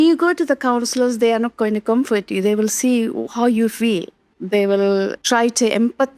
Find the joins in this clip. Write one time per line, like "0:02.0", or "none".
0:04.3
0:05.2